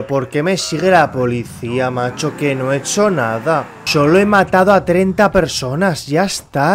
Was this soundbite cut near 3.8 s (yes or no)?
yes